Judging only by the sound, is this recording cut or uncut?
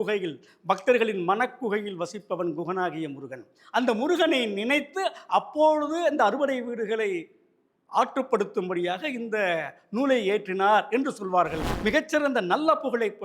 cut